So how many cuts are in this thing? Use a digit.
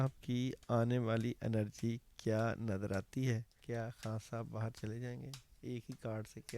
1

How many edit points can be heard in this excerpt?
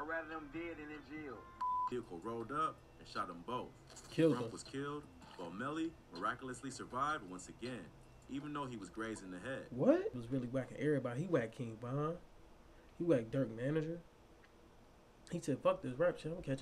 2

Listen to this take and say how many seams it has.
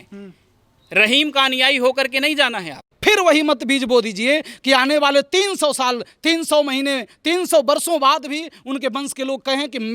1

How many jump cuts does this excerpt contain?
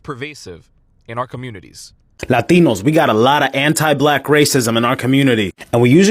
1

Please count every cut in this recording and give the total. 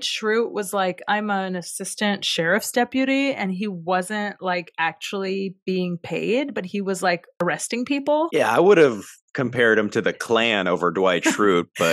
0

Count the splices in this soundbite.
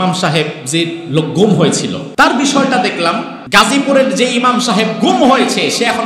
2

